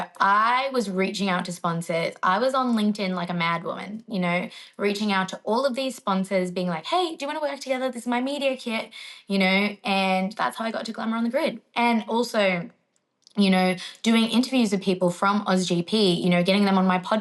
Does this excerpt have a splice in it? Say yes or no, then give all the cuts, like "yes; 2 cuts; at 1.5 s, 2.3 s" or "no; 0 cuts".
no; 0 cuts